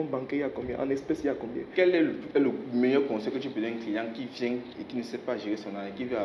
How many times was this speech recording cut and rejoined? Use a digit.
1